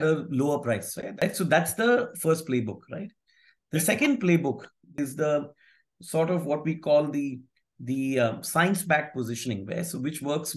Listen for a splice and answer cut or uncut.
cut